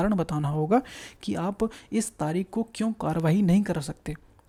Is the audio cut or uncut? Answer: uncut